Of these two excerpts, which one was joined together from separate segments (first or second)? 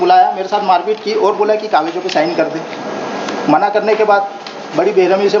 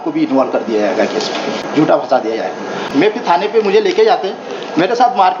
second